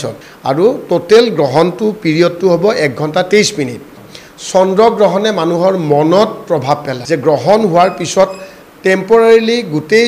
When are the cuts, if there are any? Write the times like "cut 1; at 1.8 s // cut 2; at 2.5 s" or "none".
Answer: none